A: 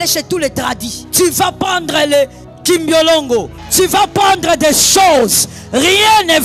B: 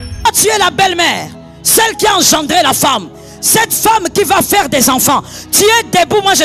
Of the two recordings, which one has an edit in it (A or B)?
A